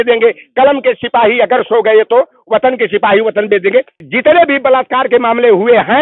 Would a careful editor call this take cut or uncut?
cut